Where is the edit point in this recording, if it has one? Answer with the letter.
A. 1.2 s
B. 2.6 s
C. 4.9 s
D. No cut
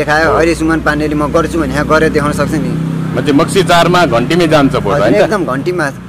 D